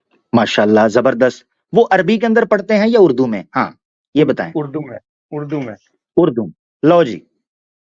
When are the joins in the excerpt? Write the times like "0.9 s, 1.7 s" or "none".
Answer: 6.9 s